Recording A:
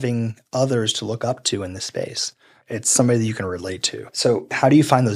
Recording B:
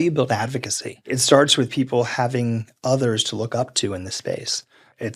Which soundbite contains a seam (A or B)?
B